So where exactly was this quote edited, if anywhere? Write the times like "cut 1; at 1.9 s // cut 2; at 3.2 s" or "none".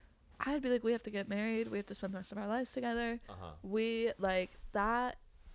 none